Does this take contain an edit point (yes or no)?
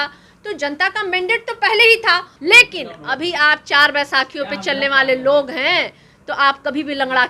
yes